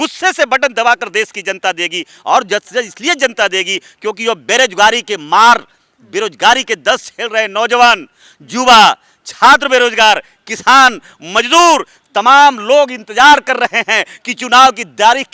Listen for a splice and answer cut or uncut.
uncut